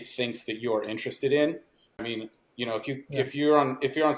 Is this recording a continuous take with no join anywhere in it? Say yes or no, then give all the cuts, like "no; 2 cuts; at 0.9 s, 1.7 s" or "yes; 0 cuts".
no; 1 cut; at 2.0 s